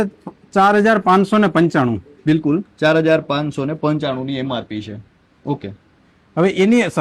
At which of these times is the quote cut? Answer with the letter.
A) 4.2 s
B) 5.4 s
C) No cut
C